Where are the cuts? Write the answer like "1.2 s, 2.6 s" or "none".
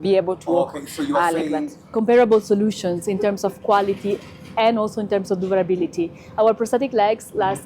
1.8 s